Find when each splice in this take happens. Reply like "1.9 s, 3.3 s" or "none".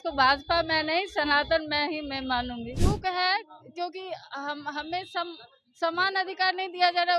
2.7 s